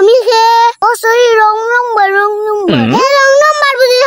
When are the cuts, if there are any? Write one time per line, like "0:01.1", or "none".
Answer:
0:02.8